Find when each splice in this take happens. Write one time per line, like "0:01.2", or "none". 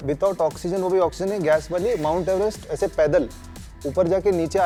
none